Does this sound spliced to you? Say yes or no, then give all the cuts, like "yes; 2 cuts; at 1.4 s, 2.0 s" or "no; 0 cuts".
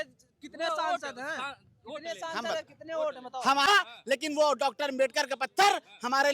yes; 1 cut; at 3.7 s